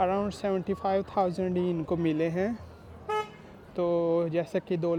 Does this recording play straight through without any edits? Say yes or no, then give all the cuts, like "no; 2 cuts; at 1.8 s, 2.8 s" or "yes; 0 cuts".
yes; 0 cuts